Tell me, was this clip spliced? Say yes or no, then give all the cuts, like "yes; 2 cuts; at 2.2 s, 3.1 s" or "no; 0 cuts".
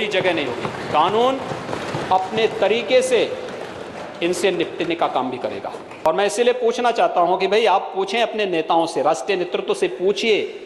yes; 1 cut; at 5.9 s